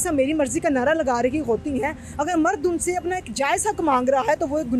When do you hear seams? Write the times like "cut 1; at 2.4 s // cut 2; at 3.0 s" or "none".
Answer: none